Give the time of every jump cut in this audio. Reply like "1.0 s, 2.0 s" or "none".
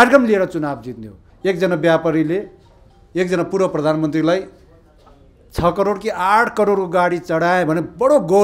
1.2 s